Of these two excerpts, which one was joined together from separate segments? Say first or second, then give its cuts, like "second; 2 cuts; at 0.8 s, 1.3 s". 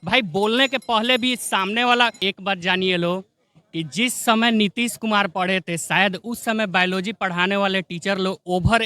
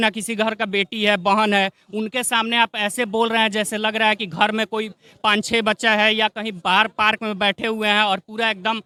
first; 1 cut; at 2.5 s